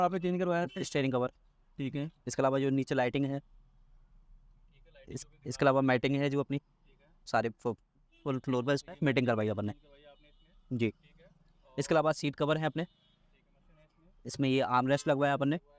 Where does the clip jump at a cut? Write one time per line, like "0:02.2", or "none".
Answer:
0:07.2
0:13.6